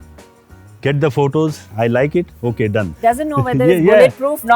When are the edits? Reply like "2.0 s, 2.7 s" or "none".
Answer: 1.6 s, 2.8 s